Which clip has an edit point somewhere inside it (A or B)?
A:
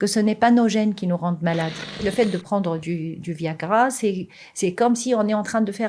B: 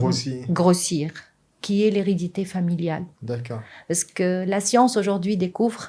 A